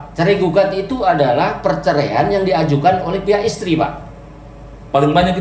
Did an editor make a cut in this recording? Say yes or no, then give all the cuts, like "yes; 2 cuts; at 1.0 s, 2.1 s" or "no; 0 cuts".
no; 0 cuts